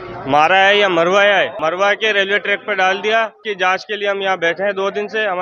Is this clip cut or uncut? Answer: cut